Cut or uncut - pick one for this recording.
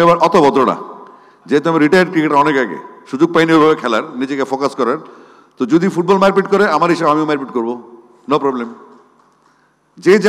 uncut